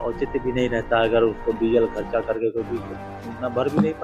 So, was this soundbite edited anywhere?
no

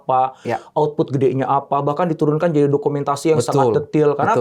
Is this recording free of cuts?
yes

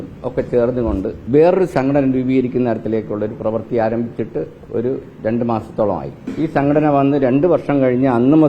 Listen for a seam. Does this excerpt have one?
yes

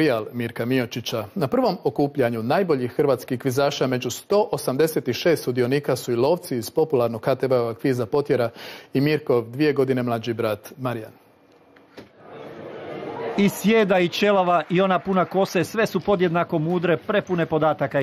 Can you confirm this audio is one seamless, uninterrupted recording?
no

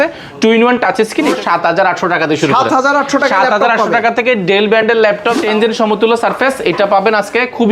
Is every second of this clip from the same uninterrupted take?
no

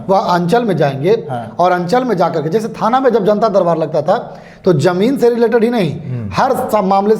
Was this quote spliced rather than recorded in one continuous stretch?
no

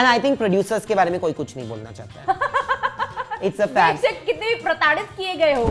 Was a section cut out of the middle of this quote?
no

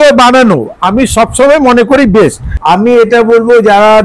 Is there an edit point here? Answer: yes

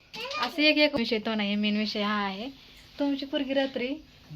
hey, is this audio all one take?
no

